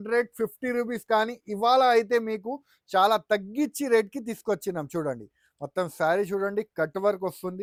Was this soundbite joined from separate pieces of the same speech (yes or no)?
no